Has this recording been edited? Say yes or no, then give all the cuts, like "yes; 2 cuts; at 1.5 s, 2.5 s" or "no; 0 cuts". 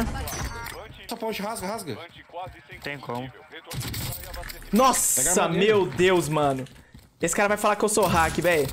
yes; 1 cut; at 1.1 s